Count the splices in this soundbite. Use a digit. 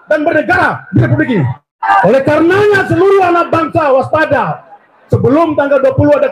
1